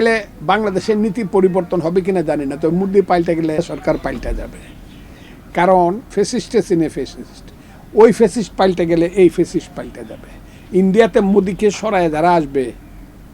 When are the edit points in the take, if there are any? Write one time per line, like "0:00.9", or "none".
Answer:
0:03.6
0:06.0